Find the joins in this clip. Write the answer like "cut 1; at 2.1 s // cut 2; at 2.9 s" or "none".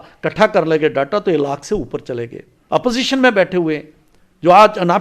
cut 1; at 2.6 s